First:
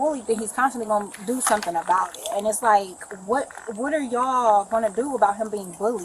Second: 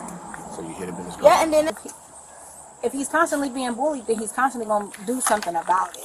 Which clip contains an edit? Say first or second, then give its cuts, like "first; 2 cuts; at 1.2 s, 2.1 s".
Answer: second; 1 cut; at 1.8 s